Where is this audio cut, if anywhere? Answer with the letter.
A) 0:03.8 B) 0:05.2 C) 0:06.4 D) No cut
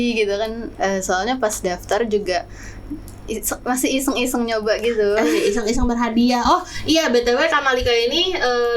D